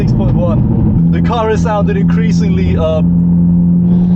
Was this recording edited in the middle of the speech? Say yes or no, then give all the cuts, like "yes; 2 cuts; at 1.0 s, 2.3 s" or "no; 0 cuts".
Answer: yes; 1 cut; at 1.0 s